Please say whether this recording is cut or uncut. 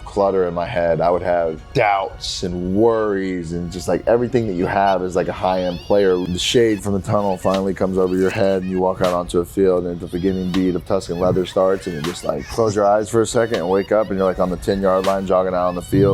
cut